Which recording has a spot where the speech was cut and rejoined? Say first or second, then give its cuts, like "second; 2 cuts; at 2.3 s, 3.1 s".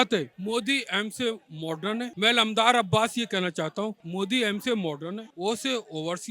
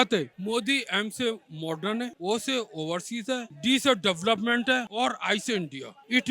second; 2 cuts; at 2.1 s, 4.9 s